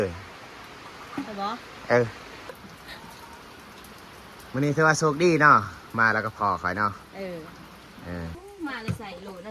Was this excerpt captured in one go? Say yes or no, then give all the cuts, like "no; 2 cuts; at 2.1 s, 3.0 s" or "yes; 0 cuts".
no; 2 cuts; at 2.7 s, 8.4 s